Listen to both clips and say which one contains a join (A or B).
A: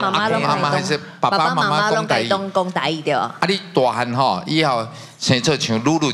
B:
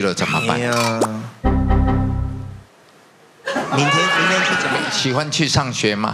B